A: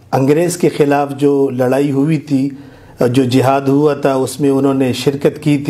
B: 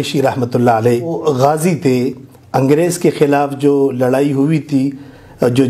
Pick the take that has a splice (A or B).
B